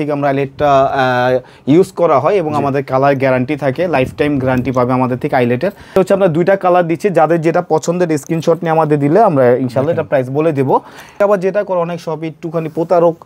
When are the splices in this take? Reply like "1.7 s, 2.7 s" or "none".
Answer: 6.0 s, 11.1 s